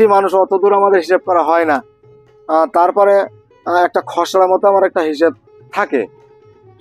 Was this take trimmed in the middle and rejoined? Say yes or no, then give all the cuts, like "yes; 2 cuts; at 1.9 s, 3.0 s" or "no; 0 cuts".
no; 0 cuts